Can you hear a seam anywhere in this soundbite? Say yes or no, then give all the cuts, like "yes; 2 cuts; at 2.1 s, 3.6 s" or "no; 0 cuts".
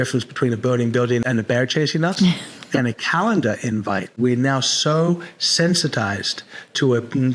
yes; 2 cuts; at 1.2 s, 4.2 s